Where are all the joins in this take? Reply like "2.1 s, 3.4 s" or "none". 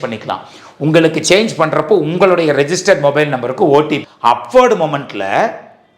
4.0 s